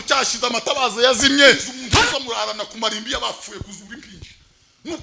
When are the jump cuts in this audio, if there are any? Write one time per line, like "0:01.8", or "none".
0:01.7